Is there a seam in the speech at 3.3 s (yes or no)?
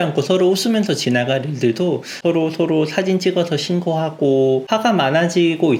no